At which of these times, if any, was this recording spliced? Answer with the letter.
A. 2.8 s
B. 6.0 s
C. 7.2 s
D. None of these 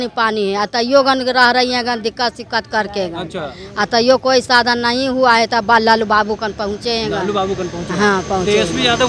D